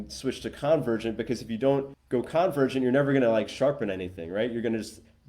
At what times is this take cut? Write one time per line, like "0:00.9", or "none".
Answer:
0:02.0